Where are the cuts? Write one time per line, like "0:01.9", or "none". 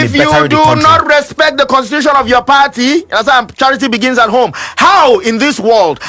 none